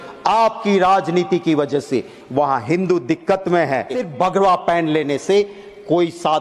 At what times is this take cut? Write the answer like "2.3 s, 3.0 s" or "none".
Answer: 3.9 s